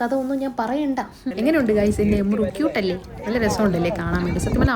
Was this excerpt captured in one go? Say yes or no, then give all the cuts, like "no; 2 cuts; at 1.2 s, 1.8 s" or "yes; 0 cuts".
no; 1 cut; at 1.2 s